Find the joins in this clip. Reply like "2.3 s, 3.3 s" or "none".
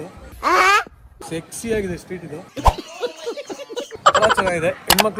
none